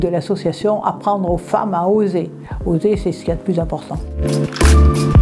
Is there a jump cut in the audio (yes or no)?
yes